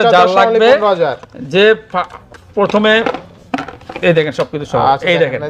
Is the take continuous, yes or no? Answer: yes